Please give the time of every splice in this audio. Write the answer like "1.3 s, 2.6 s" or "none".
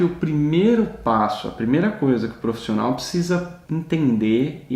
3.6 s